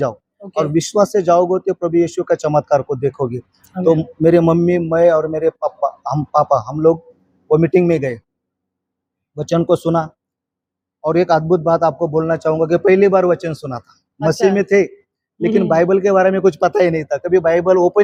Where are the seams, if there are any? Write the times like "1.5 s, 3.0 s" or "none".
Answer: none